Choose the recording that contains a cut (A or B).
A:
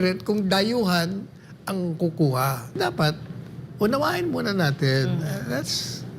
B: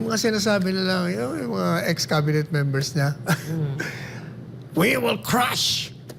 A